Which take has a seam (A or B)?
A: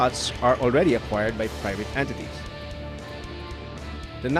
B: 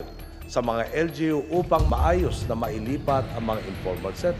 A